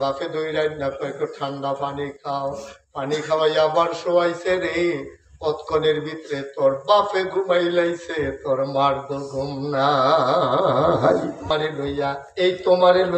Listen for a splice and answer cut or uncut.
cut